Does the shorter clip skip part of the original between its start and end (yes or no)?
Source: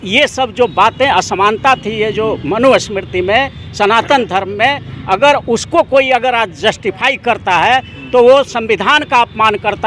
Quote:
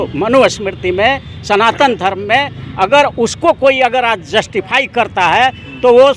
no